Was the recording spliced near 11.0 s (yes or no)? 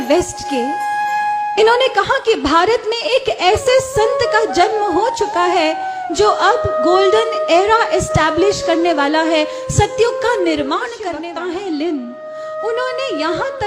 yes